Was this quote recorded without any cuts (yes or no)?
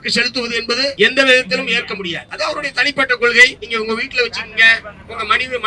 no